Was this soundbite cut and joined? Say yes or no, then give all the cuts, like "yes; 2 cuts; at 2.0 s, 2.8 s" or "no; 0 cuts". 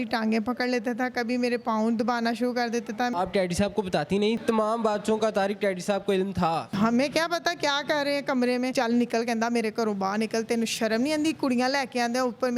yes; 4 cuts; at 3.1 s, 4.4 s, 6.7 s, 8.7 s